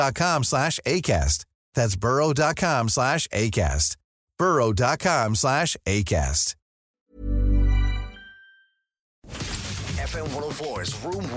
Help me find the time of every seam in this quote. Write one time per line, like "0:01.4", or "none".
0:09.2